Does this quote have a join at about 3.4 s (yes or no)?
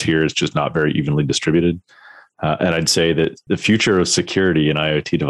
yes